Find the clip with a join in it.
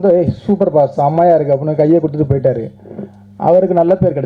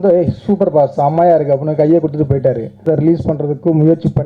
second; 1 cut; at 2.8 s

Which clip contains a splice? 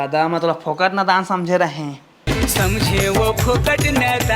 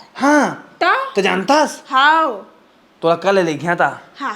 first; 1 cut; at 2.2 s

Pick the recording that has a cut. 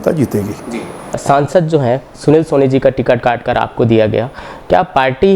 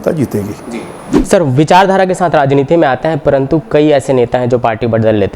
second; 1 cut; at 1.0 s

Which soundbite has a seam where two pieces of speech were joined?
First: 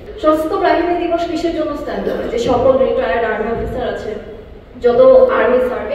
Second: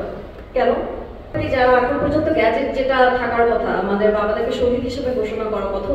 second; 1 cut; at 1.4 s

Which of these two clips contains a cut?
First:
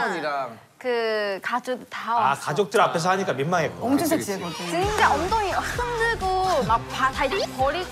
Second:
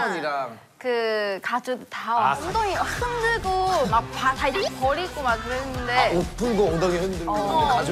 second; 1 cut; at 2.5 s

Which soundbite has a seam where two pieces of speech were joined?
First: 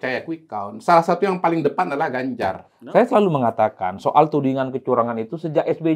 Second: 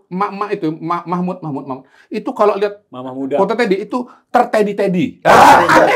first; 1 cut; at 2.7 s

